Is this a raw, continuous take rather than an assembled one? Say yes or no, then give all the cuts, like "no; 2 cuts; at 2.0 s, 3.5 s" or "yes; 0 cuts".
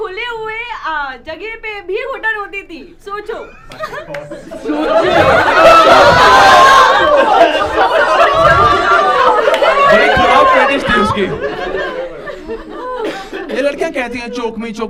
yes; 0 cuts